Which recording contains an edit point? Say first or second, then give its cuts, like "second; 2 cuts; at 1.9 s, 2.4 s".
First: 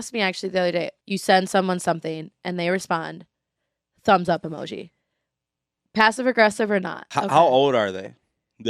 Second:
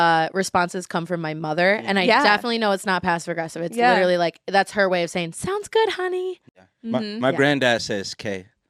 first; 2 cuts; at 1.0 s, 7.0 s